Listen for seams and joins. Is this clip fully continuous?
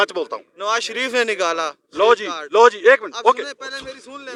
yes; 0 cuts

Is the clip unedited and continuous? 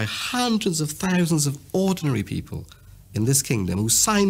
yes; 0 cuts

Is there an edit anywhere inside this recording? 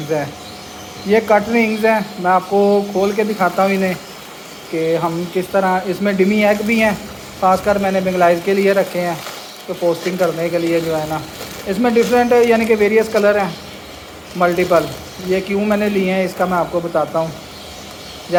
no; 0 cuts

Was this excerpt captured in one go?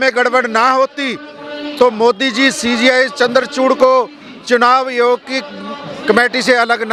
yes; 0 cuts

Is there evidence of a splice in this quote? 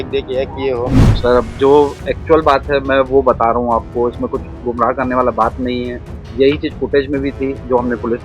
yes; 1 cut; at 1.0 s

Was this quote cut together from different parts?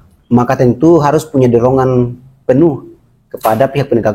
no; 0 cuts

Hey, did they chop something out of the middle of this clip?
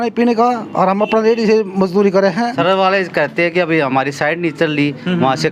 yes; 1 cut; at 2.5 s

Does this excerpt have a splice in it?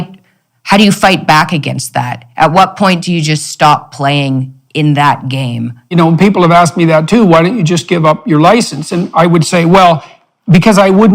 yes; 1 cut; at 5.9 s

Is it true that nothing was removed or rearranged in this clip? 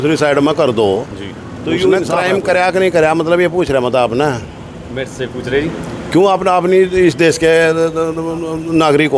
no; 1 cut; at 2.1 s

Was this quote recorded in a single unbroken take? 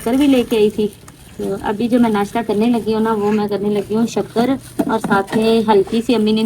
yes; 0 cuts

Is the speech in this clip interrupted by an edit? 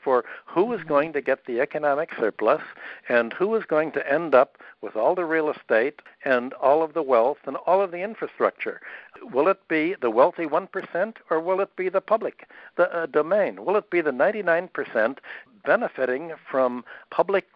no; 0 cuts

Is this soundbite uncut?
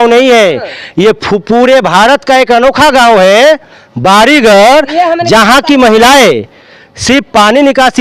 yes; 0 cuts

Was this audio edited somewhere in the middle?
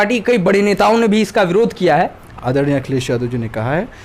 yes; 1 cut; at 2.2 s

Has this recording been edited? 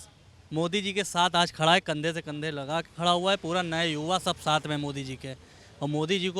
no; 0 cuts

